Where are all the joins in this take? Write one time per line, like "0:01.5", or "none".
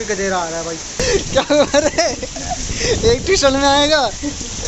0:00.9